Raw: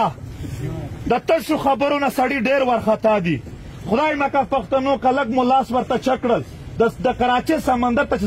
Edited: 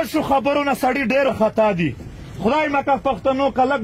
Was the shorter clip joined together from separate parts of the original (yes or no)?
yes